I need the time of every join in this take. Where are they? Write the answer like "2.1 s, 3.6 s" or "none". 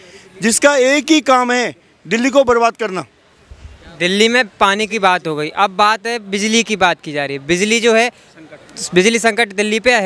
none